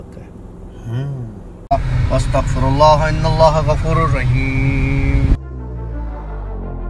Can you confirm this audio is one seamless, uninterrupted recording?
no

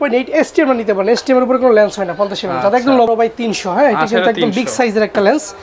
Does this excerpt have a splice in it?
yes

